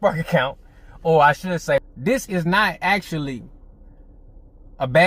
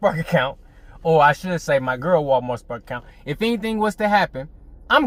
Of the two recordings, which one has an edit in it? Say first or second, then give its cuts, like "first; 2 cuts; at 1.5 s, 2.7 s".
first; 1 cut; at 1.9 s